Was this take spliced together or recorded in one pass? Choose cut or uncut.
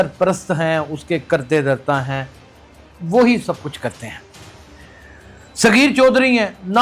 uncut